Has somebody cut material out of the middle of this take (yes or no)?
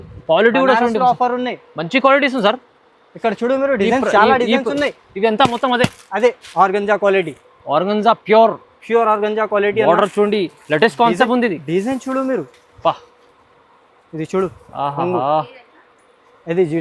yes